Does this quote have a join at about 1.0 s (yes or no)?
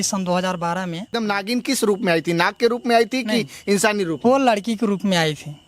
yes